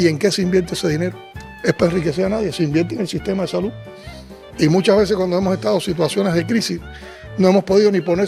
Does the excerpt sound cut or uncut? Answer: uncut